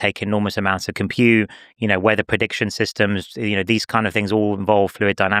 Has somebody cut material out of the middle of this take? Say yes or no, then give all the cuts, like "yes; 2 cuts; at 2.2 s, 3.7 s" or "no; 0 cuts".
no; 0 cuts